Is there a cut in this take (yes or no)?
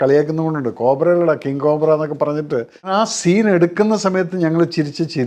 yes